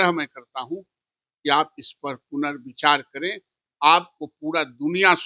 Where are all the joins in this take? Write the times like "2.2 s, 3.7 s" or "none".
none